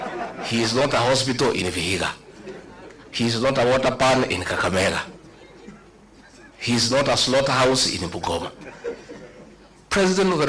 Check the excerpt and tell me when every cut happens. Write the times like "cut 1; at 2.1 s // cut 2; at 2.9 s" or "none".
none